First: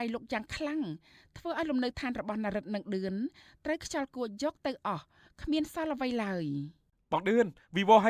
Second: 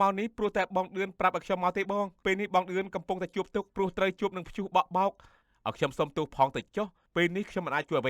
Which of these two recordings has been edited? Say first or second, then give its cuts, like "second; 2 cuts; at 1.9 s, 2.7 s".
second; 4 cuts; at 2.1 s, 3.7 s, 5.3 s, 7.0 s